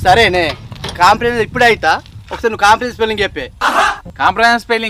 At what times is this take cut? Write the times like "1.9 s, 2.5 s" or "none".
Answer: none